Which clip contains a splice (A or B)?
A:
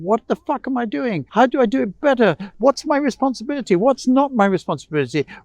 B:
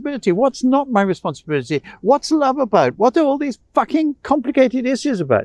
A